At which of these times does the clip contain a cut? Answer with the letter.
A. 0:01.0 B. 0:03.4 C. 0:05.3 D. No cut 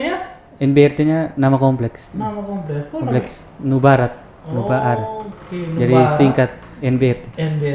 D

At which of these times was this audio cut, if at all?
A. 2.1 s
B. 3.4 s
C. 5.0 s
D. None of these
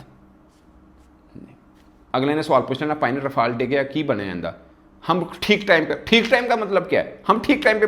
A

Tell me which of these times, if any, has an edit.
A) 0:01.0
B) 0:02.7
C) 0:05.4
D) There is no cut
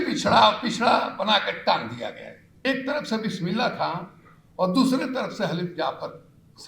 B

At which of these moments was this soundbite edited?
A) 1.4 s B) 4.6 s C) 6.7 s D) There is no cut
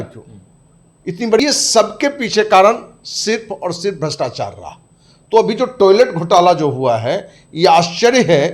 A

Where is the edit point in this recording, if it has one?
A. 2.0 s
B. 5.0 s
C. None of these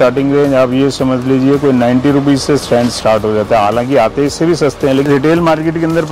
B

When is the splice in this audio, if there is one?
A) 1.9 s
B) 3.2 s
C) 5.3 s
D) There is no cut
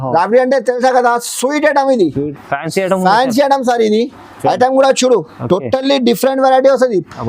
D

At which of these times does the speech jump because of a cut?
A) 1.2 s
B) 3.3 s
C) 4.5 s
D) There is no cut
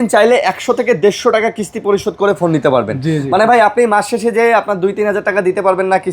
D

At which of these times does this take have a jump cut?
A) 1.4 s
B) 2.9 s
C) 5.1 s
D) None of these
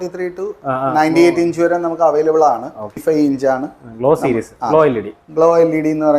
B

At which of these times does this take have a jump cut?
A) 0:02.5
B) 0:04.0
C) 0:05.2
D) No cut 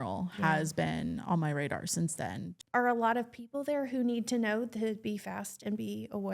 A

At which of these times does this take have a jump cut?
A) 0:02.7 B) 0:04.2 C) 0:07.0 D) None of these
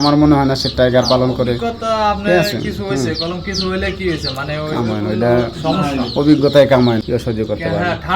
C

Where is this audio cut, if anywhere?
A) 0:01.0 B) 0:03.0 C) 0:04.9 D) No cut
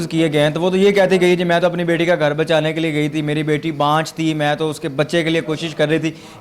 D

